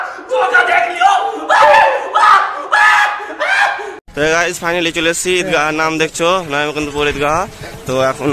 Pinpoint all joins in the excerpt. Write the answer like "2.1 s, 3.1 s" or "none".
4.0 s